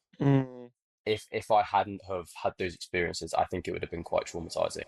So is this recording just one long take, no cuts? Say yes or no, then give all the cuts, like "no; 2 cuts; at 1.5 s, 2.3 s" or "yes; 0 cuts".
yes; 0 cuts